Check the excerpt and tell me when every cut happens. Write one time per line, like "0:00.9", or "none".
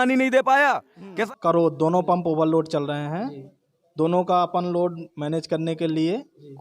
0:01.3

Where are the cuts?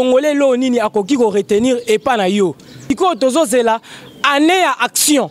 0:02.8

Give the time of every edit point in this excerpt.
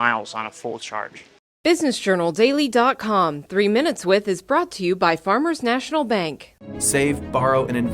0:01.2

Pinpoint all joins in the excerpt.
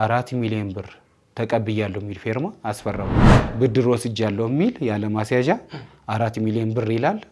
0:03.2

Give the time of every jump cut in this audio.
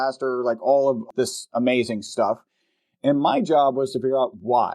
0:01.0

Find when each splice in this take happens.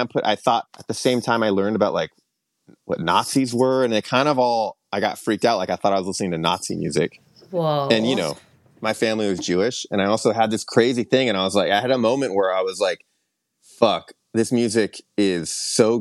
0:08.3

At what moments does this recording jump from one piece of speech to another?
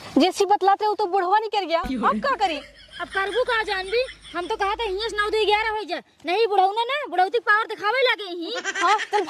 none

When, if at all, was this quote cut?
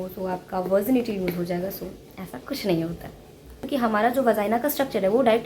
0:03.6

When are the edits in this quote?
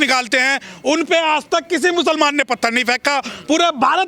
none

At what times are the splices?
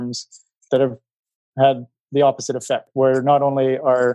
0:01.0
0:02.9

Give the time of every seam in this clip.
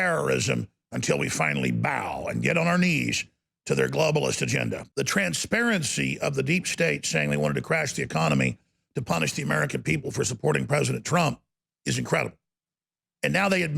0:04.9

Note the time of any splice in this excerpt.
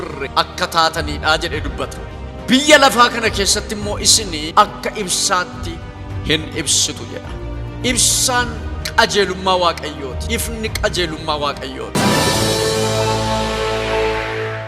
0:12.0

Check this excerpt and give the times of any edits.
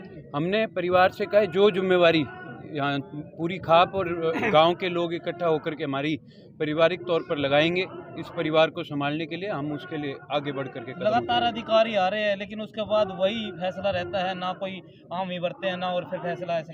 none

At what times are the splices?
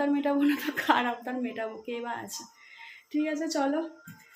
none

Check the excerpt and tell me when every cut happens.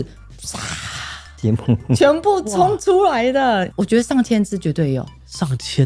none

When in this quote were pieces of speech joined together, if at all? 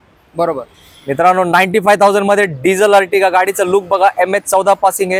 none

